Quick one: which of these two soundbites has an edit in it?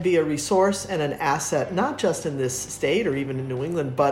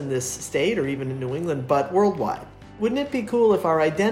second; 1 cut; at 2.7 s

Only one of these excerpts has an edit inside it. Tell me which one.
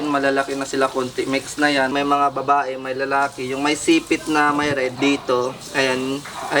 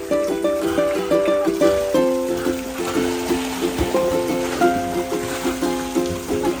first; 2 cuts; at 1.9 s, 4.9 s

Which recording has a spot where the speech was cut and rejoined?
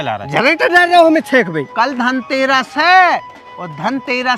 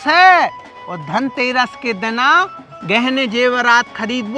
first; 1 cut; at 1.6 s

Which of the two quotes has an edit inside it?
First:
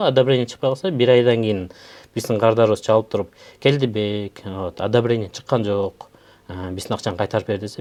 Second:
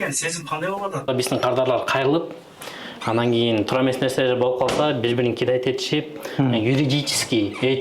second; 1 cut; at 1.1 s

